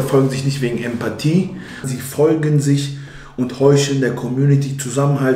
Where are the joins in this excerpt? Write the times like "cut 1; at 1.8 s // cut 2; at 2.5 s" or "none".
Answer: cut 1; at 1.9 s